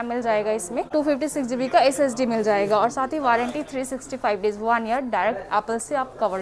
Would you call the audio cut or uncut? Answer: cut